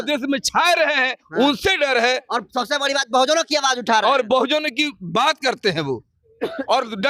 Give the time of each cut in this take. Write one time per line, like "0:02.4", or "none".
none